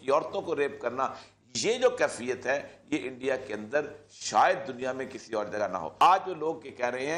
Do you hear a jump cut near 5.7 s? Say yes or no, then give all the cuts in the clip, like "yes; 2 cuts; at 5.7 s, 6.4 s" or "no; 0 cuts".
no; 0 cuts